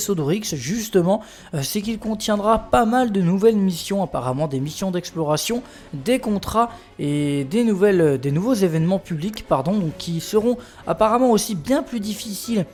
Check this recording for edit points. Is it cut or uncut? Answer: uncut